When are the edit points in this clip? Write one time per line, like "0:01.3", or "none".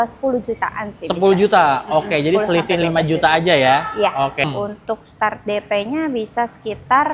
0:04.4

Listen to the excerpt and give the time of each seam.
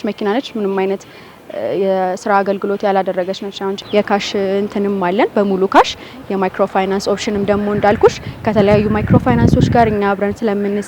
0:03.8

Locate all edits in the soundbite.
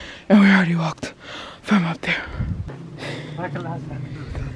0:02.7

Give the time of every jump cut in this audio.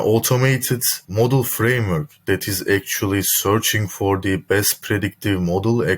none

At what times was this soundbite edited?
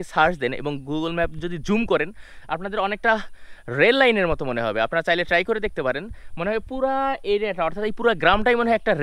none

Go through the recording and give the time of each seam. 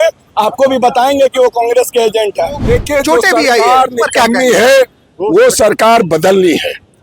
0:02.6

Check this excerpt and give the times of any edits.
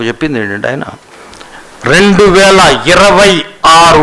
0:01.1

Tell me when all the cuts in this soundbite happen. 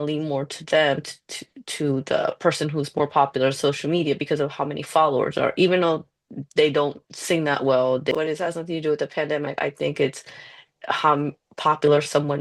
0:08.1

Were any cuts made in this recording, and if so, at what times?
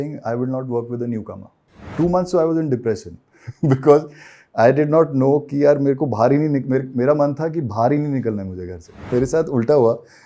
0:01.9
0:09.1

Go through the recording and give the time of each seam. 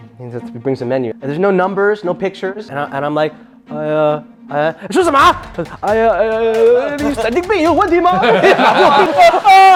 none

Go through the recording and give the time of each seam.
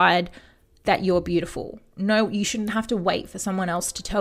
none

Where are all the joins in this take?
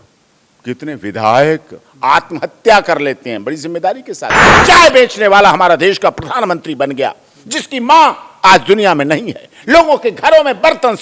0:04.5

